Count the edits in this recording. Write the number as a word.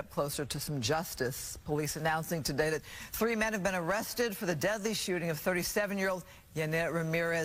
zero